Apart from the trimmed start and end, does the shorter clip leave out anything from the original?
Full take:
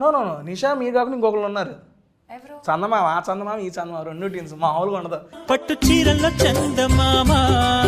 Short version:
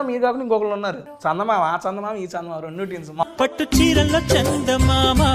yes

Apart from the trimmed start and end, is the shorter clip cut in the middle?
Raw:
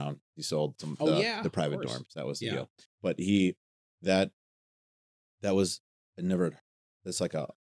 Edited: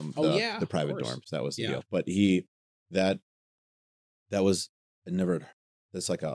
yes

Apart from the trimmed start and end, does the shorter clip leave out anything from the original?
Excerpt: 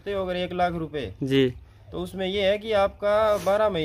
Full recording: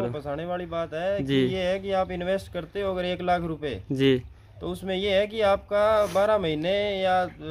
no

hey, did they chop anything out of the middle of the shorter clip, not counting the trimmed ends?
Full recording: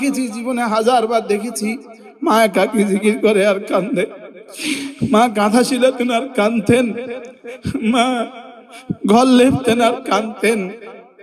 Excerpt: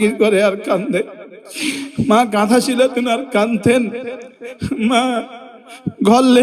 no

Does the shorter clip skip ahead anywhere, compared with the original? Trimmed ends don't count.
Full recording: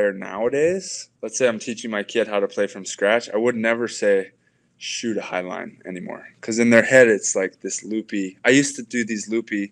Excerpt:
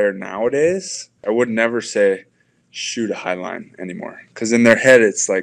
yes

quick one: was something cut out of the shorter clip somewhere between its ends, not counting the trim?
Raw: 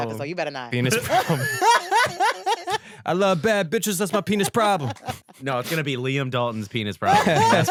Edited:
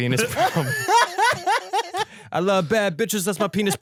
no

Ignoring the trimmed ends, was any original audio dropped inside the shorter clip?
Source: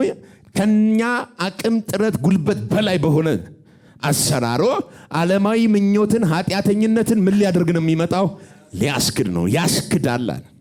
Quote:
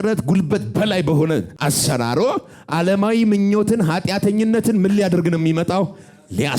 yes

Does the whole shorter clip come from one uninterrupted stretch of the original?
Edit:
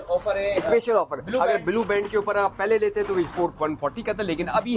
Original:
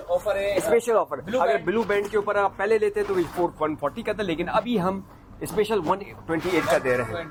yes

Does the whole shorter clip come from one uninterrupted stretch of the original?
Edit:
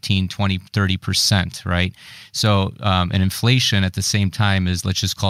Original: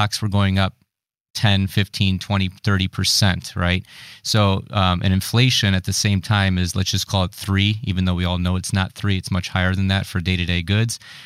yes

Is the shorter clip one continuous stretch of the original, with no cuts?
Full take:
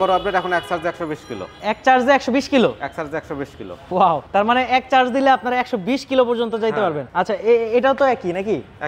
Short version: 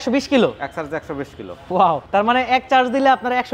yes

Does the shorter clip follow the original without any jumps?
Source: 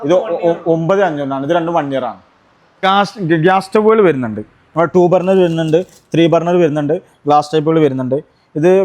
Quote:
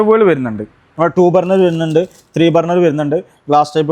yes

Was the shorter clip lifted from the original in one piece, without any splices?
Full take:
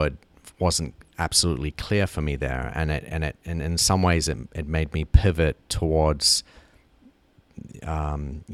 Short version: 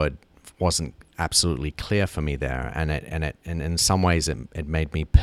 yes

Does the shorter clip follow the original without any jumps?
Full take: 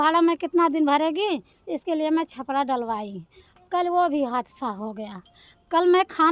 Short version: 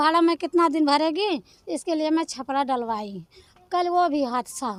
yes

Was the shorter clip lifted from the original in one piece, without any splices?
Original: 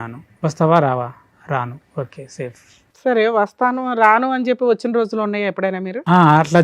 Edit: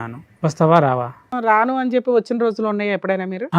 no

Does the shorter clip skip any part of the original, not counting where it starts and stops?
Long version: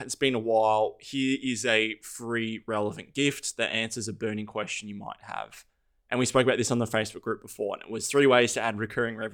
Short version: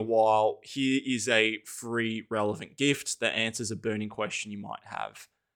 no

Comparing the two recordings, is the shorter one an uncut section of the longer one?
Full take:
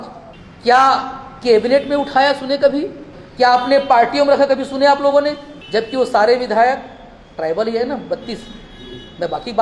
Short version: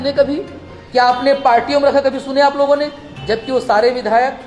yes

